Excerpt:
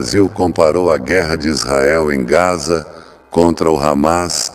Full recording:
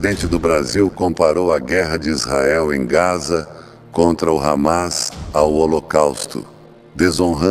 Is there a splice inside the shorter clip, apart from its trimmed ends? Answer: no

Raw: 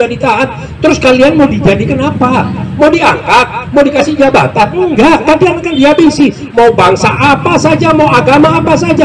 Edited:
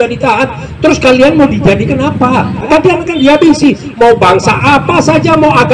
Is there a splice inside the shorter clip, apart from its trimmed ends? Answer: yes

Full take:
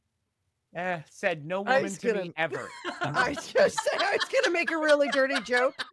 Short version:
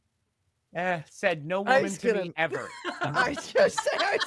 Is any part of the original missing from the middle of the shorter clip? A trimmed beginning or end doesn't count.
no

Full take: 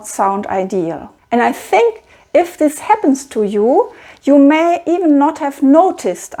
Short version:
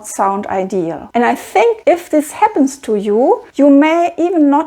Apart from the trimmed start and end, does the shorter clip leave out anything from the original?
yes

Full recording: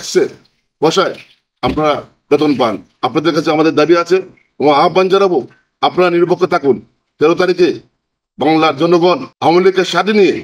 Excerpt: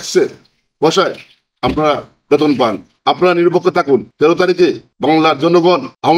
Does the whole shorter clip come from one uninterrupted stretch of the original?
no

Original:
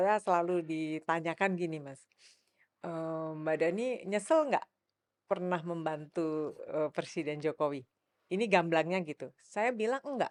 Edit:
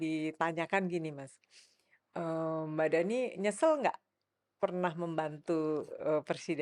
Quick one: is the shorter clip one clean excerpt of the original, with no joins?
yes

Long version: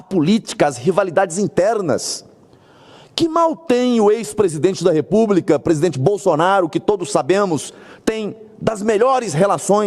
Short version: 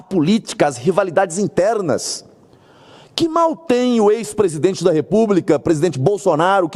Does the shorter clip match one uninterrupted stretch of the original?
yes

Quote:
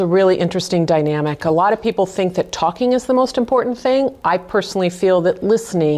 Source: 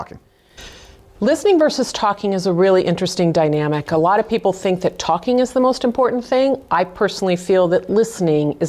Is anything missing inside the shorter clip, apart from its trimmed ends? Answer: no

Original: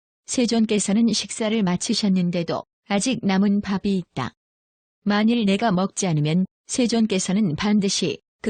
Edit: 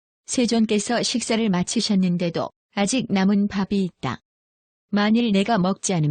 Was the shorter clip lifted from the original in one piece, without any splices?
no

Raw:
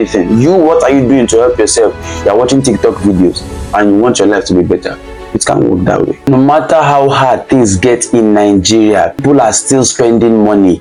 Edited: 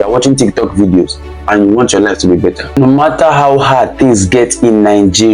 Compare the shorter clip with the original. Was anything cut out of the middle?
yes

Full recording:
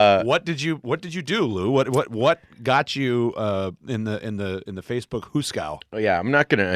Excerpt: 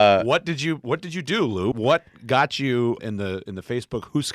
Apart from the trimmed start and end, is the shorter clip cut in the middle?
yes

